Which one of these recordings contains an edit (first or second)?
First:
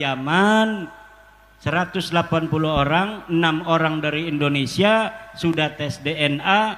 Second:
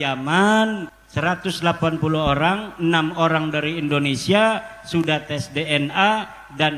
second